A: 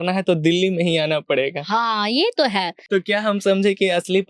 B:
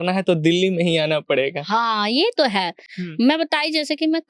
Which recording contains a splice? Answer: A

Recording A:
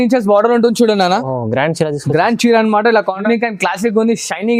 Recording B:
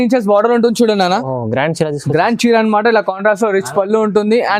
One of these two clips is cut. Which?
A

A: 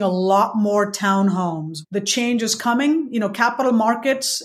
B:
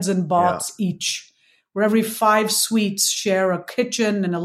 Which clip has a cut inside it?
A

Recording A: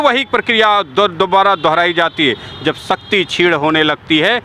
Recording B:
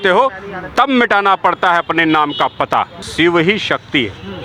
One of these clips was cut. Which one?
B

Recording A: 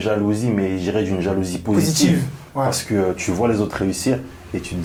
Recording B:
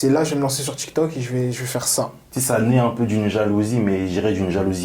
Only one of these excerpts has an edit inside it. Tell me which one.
B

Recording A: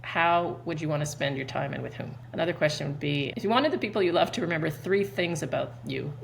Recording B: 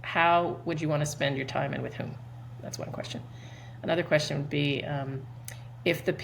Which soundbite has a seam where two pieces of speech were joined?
A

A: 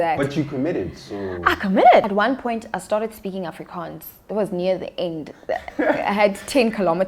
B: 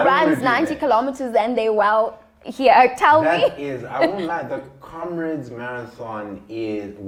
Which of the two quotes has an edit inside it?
A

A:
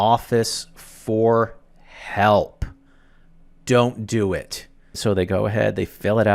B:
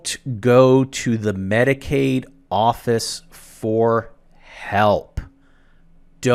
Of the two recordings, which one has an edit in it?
A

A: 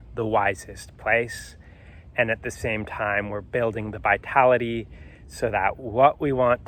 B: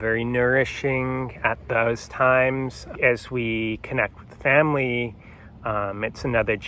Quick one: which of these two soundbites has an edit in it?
B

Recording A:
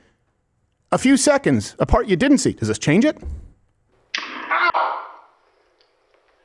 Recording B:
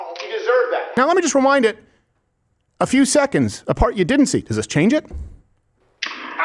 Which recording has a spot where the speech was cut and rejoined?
B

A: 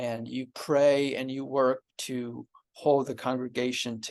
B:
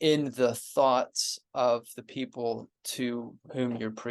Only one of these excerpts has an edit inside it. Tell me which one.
B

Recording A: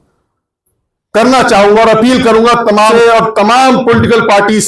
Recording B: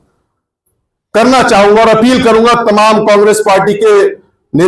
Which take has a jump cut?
A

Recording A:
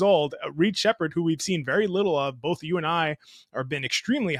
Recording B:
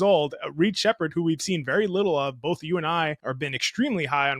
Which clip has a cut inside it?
B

